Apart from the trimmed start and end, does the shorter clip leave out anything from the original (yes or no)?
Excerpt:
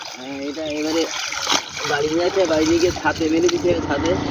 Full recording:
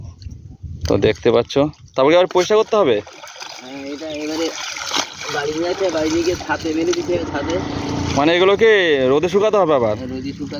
no